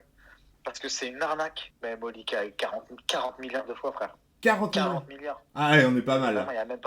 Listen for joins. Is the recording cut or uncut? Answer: cut